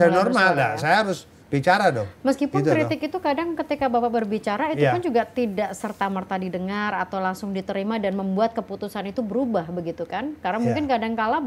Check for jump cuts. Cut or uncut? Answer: uncut